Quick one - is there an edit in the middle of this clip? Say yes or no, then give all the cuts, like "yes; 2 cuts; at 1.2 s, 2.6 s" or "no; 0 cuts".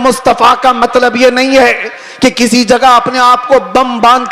no; 0 cuts